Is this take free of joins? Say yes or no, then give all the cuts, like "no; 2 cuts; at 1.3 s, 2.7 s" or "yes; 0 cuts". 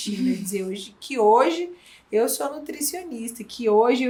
yes; 0 cuts